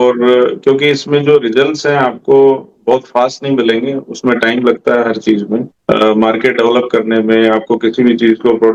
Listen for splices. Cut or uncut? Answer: uncut